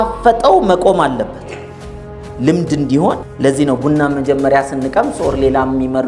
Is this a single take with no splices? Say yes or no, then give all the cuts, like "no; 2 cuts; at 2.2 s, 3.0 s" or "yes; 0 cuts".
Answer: no; 1 cut; at 3.3 s